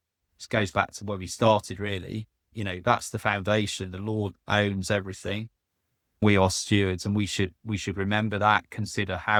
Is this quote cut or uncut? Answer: uncut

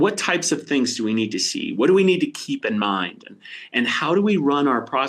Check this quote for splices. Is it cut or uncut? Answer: uncut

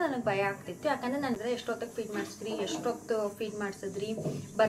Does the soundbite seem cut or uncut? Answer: cut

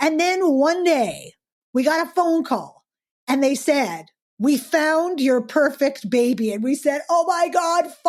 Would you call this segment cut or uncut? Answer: uncut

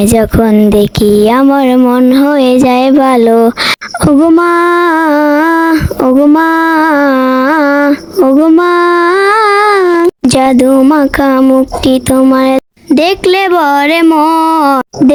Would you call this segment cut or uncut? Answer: uncut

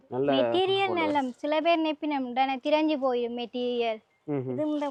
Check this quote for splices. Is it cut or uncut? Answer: uncut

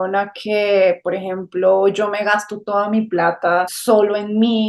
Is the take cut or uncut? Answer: cut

